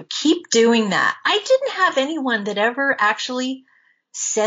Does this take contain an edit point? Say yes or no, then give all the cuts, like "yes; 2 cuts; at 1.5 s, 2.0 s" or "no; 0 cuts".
no; 0 cuts